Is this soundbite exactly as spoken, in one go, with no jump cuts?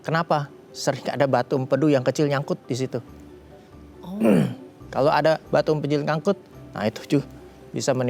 yes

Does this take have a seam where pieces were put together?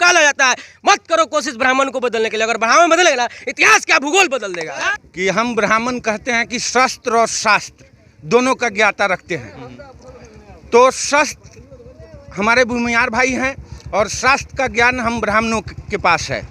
yes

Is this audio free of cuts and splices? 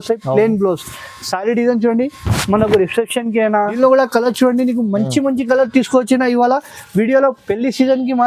no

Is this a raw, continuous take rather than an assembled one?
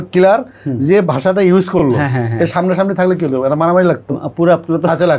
yes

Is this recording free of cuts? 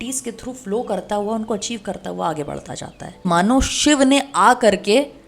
no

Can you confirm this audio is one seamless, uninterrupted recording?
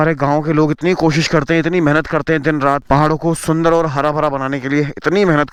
yes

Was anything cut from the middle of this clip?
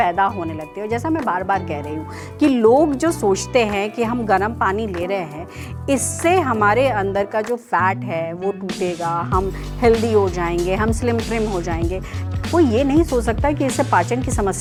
no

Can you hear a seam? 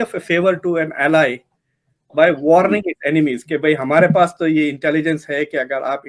no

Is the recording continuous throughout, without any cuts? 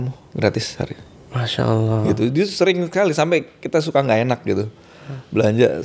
yes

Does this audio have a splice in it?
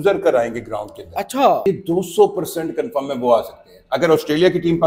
yes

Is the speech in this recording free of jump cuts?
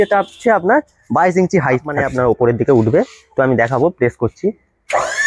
no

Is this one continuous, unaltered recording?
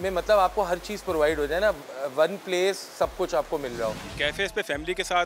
no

